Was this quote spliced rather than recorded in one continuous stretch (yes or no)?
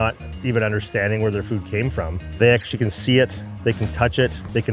yes